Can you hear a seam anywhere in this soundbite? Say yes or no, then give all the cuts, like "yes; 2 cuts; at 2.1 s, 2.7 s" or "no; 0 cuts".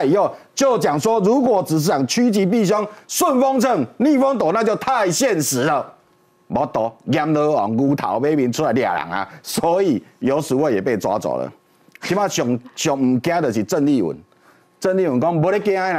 no; 0 cuts